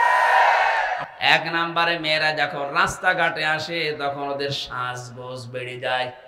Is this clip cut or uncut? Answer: cut